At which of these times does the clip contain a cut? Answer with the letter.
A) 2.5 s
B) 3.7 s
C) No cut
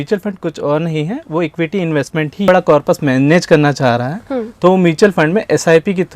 A